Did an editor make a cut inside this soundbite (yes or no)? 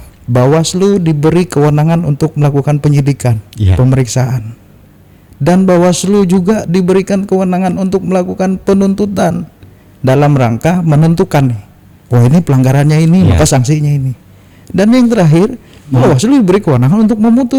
no